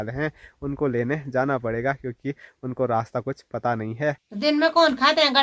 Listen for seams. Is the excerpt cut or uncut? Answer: cut